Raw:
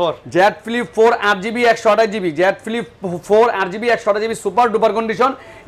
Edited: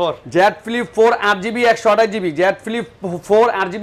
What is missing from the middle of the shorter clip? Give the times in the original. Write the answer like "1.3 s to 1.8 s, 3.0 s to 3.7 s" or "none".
none